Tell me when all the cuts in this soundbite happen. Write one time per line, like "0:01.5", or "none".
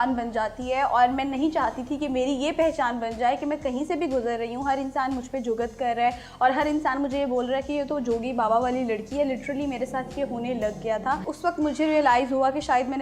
0:11.3